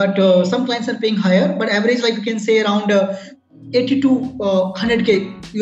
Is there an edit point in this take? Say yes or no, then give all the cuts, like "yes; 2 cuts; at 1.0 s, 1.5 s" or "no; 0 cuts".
yes; 1 cut; at 3.3 s